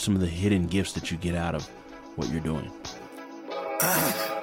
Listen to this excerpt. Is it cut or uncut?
cut